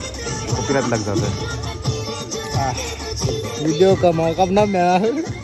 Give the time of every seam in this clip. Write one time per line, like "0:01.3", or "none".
none